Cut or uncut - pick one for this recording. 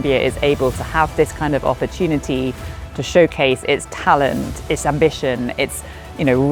uncut